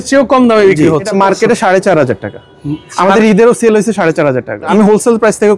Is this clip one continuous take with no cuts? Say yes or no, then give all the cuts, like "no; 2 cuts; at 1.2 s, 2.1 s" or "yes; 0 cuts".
no; 2 cuts; at 1.1 s, 4.7 s